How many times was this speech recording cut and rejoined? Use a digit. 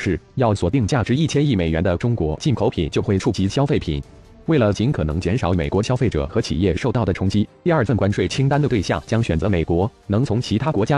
1